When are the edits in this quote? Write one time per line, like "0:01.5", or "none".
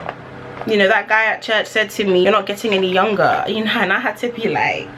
0:02.2